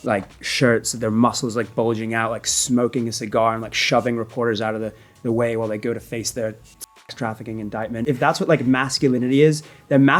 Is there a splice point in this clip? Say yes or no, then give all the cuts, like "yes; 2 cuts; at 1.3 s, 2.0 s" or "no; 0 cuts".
yes; 1 cut; at 8.0 s